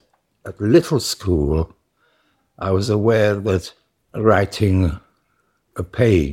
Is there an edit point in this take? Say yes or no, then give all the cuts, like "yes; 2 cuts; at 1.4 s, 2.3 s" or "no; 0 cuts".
no; 0 cuts